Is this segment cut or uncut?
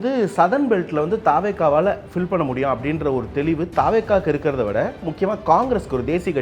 cut